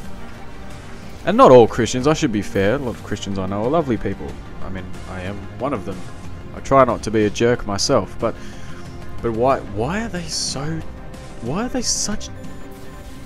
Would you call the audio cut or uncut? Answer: cut